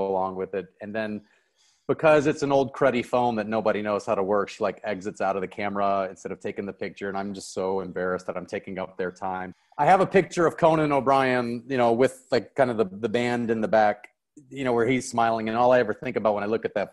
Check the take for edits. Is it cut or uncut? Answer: cut